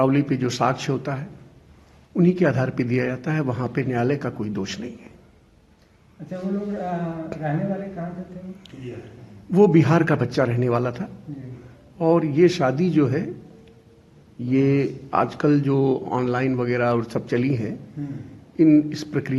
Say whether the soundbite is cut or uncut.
uncut